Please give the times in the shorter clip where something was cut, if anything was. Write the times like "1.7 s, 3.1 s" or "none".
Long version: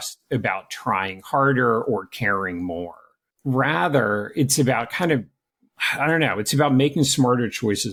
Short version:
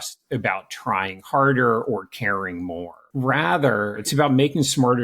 3.0 s, 4.0 s